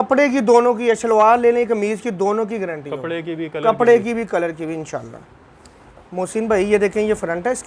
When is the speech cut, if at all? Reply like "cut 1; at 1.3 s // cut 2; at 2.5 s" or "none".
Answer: none

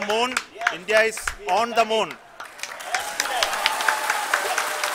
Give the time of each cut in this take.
none

